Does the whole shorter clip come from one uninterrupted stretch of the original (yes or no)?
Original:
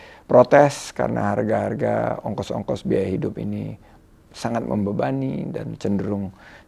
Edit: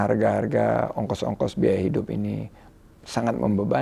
yes